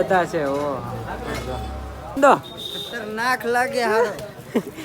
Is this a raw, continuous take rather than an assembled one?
no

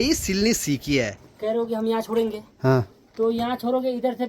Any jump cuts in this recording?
yes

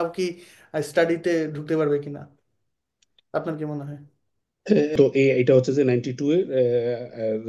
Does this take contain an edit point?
yes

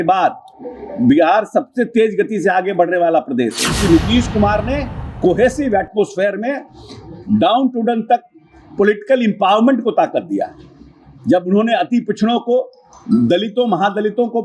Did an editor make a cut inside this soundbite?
yes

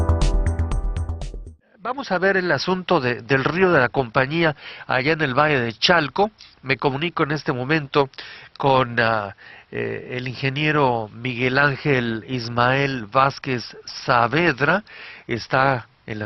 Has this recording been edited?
no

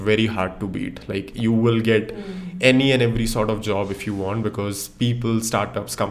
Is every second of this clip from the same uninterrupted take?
yes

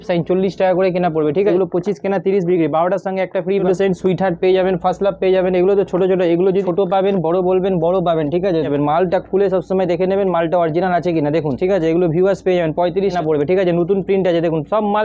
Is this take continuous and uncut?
no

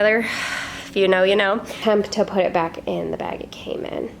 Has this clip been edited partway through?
yes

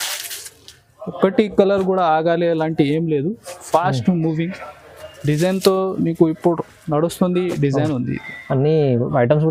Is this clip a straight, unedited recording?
yes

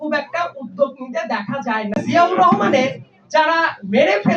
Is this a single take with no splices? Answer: no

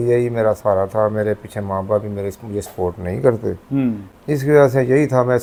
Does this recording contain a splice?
no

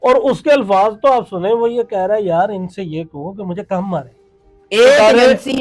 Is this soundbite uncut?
yes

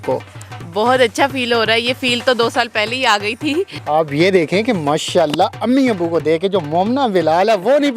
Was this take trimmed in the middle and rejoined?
yes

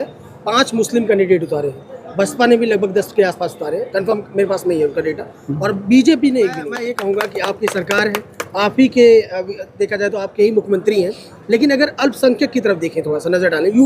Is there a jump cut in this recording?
yes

